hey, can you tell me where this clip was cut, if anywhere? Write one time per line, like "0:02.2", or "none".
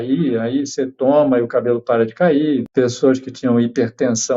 0:02.7